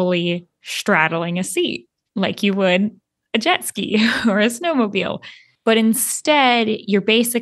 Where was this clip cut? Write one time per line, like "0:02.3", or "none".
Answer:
0:05.5